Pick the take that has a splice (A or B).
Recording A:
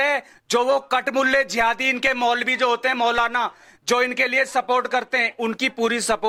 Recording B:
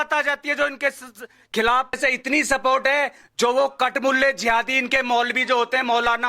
B